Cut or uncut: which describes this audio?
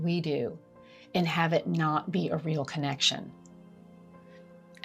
uncut